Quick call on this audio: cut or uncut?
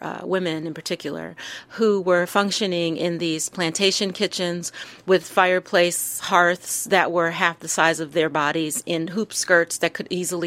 uncut